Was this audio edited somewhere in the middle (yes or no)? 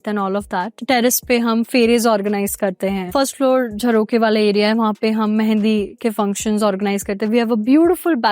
no